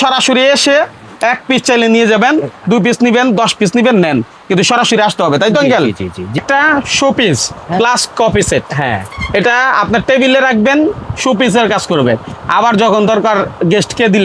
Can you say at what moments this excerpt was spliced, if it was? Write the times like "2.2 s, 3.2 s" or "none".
6.4 s